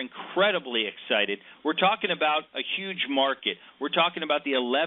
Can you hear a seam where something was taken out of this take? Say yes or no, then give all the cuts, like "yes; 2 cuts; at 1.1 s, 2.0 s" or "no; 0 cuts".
no; 0 cuts